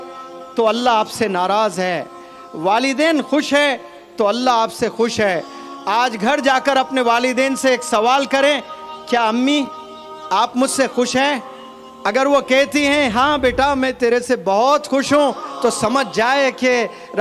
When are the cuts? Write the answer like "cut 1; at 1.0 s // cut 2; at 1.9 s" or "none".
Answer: none